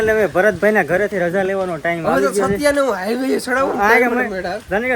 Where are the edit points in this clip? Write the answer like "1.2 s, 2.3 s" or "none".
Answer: none